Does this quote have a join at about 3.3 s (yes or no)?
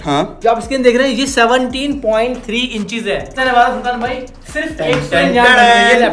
yes